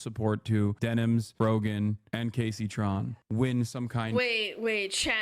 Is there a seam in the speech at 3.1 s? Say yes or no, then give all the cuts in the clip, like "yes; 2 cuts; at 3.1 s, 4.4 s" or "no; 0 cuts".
yes; 1 cut; at 3.1 s